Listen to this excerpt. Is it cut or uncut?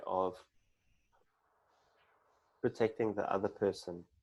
uncut